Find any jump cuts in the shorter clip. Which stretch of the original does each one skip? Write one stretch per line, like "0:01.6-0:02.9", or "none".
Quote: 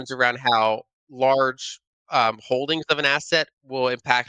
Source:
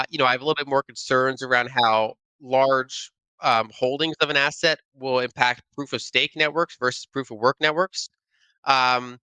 none